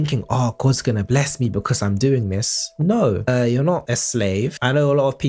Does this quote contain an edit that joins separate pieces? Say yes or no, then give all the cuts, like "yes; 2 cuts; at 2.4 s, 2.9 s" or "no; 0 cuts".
no; 0 cuts